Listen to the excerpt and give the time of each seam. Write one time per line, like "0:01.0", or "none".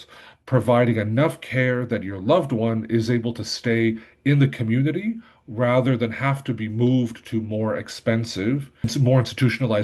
0:08.8